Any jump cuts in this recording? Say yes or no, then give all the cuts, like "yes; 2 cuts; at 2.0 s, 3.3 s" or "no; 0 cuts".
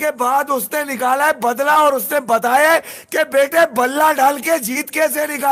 no; 0 cuts